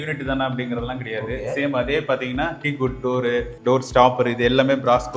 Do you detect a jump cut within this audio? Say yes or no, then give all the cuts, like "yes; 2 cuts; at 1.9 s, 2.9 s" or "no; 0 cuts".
no; 0 cuts